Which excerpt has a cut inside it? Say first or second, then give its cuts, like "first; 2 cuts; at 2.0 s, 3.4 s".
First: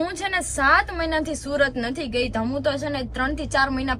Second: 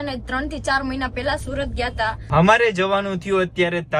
second; 1 cut; at 2.2 s